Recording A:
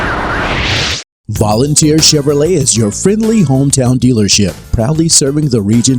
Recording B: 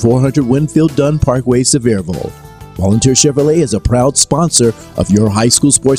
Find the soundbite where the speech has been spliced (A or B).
A